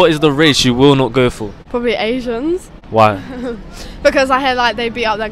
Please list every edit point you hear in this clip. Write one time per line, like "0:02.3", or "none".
0:01.5
0:02.8